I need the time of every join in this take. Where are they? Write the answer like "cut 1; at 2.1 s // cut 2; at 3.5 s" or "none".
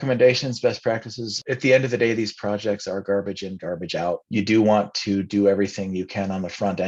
cut 1; at 1.4 s // cut 2; at 4.2 s